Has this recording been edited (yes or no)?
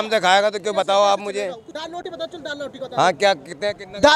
no